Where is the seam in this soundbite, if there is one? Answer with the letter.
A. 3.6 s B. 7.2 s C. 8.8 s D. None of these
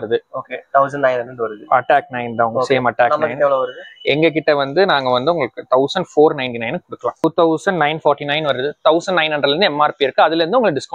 B